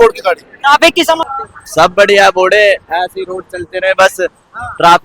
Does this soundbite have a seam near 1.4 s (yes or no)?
yes